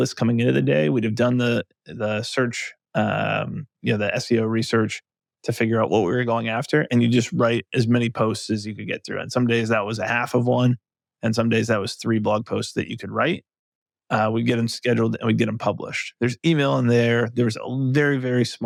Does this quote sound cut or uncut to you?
uncut